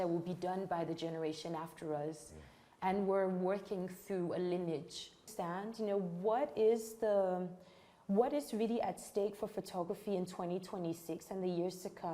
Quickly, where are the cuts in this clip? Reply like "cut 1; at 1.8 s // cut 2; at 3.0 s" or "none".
cut 1; at 5.3 s